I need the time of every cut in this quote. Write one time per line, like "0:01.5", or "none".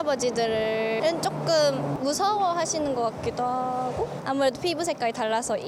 none